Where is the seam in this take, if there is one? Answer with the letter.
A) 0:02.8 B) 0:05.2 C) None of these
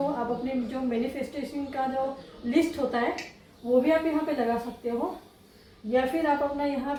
C